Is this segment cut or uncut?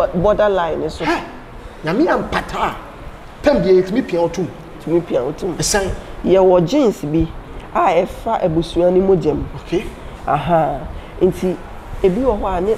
uncut